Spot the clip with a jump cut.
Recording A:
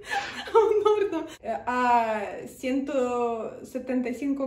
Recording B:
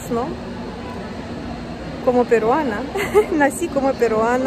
A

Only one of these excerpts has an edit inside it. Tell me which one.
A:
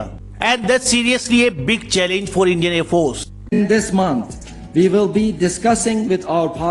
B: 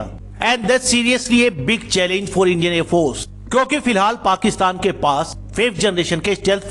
A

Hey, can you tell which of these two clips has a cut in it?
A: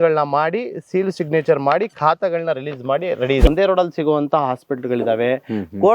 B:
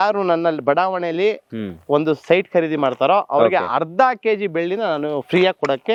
A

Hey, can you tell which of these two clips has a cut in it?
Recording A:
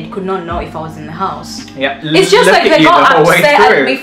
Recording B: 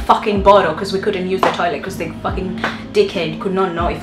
A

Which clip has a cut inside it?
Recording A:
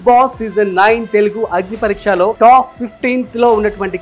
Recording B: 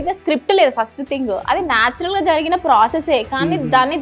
A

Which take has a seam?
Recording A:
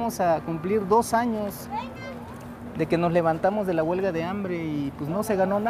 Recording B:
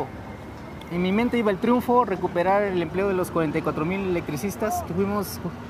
A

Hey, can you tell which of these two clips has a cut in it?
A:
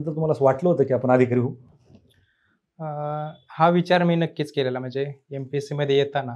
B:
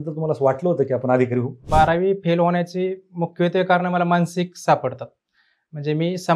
B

